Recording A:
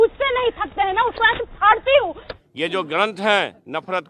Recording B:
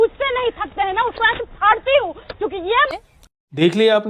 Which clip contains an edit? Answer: A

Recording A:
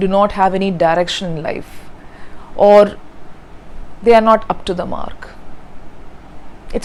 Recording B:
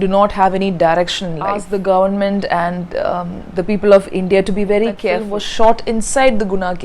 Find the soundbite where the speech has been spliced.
B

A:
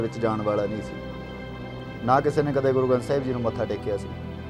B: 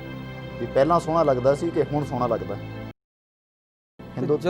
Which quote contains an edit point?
B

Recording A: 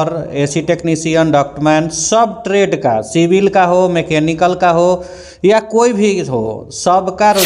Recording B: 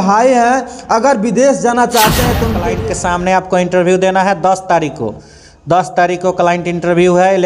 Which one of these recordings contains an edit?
B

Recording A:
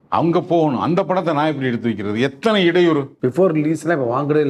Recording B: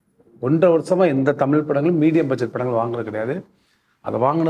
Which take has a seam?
A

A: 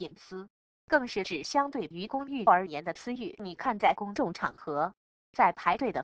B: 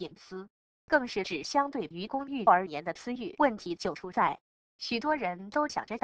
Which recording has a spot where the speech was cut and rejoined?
B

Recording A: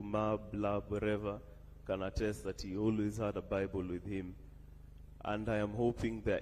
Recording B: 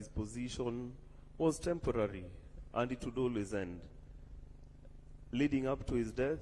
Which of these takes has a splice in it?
B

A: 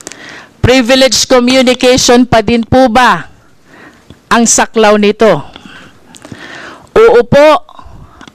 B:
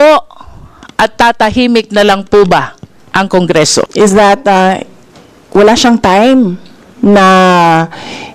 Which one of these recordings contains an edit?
B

